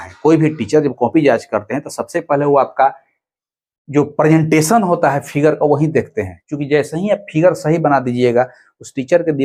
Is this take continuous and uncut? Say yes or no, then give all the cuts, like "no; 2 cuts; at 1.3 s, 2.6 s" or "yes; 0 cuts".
yes; 0 cuts